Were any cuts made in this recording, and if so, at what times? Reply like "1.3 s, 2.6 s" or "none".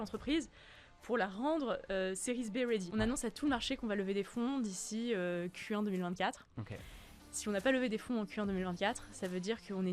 2.9 s

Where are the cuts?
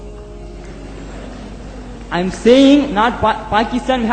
none

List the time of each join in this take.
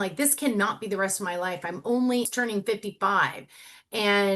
2.3 s

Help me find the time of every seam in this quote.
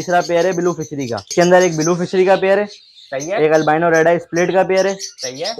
1.3 s

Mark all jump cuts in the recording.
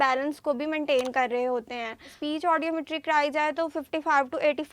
2.1 s

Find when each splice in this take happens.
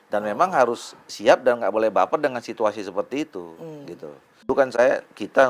4.4 s

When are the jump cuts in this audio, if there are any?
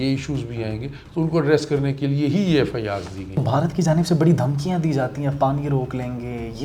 3.4 s

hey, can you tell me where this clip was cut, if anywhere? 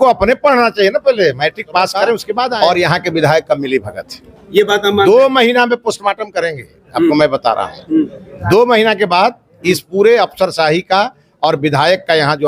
2.5 s

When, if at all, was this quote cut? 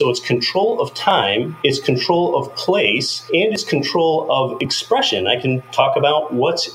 1.5 s, 3.1 s

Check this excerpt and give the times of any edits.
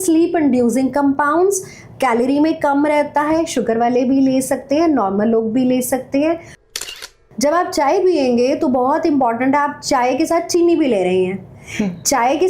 7.1 s

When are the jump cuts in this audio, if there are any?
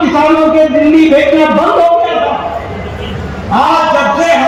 none

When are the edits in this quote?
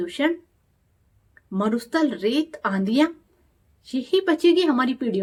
none

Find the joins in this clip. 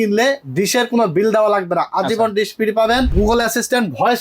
3.1 s

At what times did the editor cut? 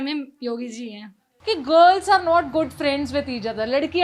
1.2 s

